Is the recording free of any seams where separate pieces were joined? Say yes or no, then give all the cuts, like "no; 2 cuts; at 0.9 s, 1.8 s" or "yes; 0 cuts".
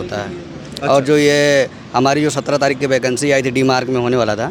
yes; 0 cuts